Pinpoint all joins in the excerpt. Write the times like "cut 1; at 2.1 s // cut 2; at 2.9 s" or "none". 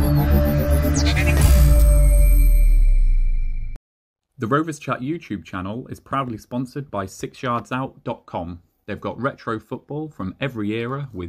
cut 1; at 4.3 s